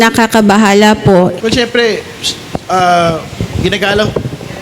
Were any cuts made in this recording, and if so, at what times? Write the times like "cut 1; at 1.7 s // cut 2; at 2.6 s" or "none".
cut 1; at 1.4 s